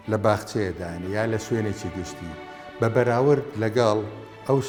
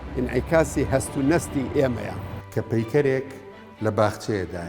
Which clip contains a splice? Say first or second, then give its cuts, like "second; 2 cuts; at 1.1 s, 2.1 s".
second; 1 cut; at 2.3 s